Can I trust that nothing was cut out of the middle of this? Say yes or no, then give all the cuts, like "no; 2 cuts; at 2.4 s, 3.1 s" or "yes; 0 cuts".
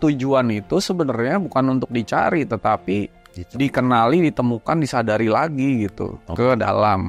yes; 0 cuts